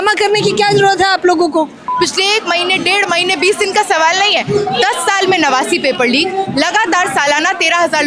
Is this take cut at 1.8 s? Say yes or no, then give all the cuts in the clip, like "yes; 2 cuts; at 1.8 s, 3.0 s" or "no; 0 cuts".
yes; 1 cut; at 1.8 s